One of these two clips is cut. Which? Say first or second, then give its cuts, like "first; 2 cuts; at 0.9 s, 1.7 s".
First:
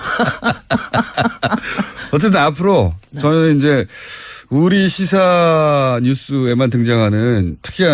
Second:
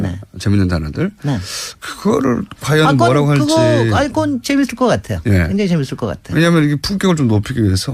second; 1 cut; at 6.6 s